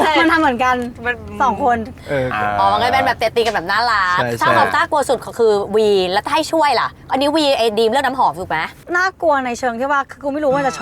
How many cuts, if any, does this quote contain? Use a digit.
0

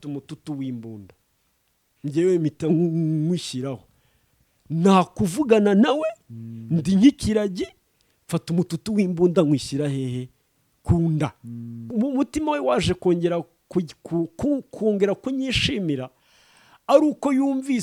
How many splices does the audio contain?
1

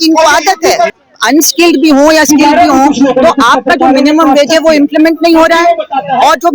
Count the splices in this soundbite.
1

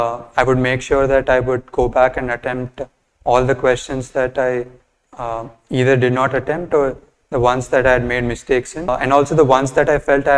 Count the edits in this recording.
1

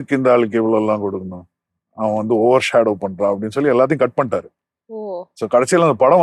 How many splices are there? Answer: 0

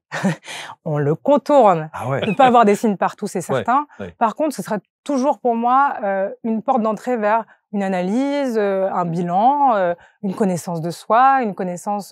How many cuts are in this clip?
1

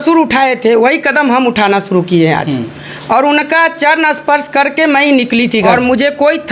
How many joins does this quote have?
1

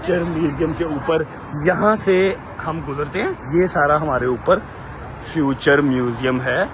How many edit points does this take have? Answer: 1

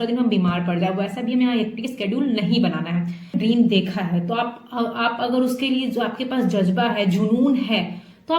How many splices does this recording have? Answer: 1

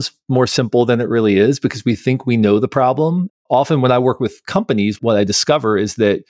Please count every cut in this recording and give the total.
1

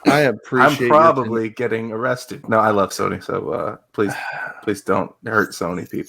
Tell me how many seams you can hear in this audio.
1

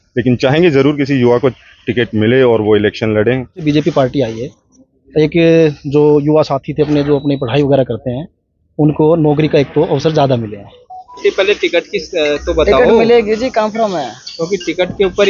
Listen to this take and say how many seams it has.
2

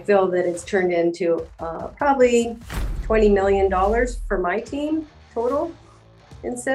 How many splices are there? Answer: 0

